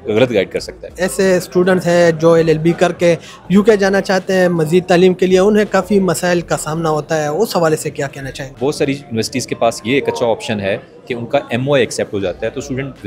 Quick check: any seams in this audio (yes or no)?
yes